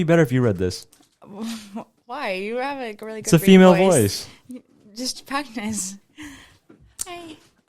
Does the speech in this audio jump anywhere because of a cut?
no; 0 cuts

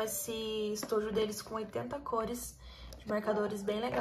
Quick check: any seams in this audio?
no; 0 cuts

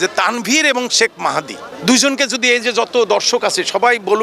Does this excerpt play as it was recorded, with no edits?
no; 1 cut; at 1.6 s

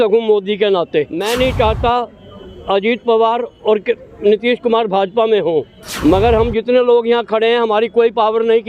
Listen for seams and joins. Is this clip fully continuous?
no; 2 cuts; at 1.2 s, 5.8 s

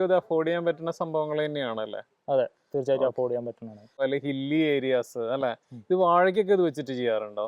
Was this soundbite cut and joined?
yes; 1 cut; at 3.9 s

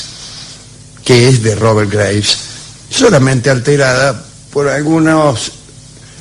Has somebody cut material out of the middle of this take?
yes; 1 cut; at 4.4 s

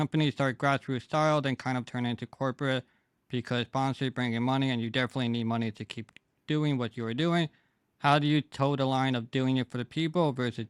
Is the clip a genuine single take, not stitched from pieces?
yes; 0 cuts

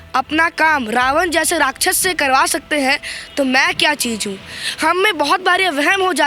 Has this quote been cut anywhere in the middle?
no; 0 cuts

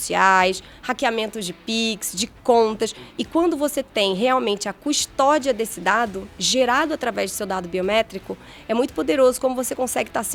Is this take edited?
no; 0 cuts

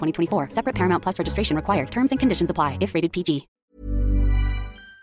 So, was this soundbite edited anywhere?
yes; 1 cut; at 3.5 s

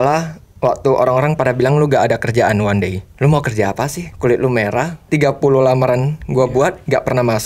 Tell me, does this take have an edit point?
yes; 3 cuts; at 3.0 s, 4.0 s, 5.0 s

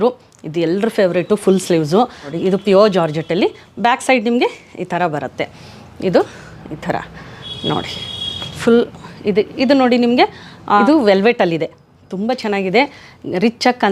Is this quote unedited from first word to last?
no; 1 cut; at 2.3 s

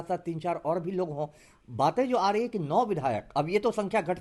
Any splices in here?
no; 0 cuts

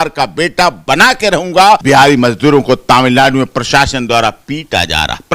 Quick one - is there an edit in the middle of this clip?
yes; 1 cut; at 1.8 s

